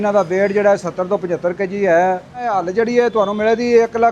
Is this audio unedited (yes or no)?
no